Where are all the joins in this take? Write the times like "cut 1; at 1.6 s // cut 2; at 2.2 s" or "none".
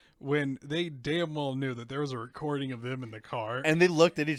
none